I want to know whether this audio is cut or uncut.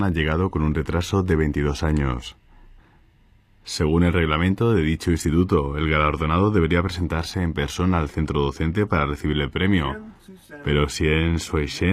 uncut